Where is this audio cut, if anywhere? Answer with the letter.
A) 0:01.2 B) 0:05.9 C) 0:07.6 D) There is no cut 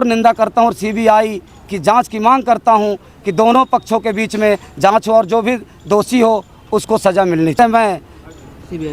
C